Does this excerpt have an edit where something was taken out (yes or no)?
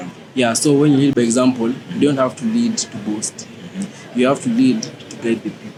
no